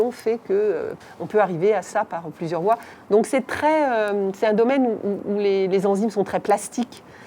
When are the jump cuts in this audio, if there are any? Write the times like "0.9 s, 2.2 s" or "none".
0.9 s, 2.9 s